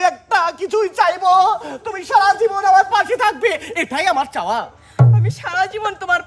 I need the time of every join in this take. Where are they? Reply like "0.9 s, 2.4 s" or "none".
none